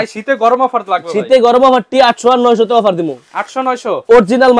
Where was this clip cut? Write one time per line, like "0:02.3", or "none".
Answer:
none